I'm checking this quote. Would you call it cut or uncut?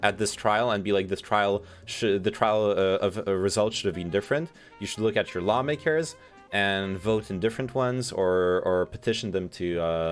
uncut